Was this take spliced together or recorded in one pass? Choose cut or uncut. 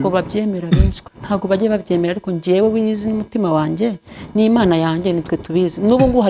cut